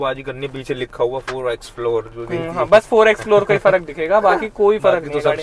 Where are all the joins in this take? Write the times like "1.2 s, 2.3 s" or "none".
none